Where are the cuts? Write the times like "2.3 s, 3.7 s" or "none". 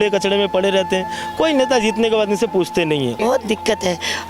3.2 s